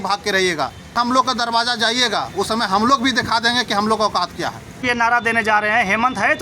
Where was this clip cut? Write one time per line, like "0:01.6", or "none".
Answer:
0:00.9
0:04.9